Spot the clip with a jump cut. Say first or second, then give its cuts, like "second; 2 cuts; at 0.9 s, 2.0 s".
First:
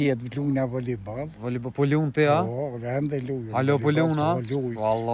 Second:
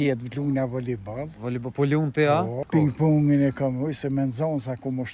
second; 1 cut; at 2.6 s